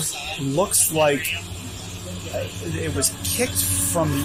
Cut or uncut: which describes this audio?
uncut